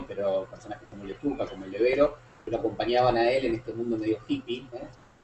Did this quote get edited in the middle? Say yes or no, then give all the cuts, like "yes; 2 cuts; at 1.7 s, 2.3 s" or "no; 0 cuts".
no; 0 cuts